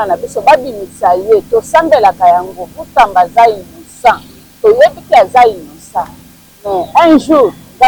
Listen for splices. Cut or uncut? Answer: uncut